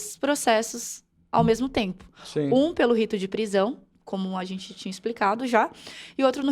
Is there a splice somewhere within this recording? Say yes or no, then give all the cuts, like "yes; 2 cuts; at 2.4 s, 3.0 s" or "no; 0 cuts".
no; 0 cuts